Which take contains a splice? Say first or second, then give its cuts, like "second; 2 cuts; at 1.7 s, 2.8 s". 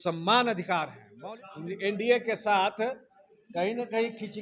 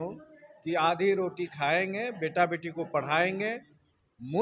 first; 1 cut; at 1.0 s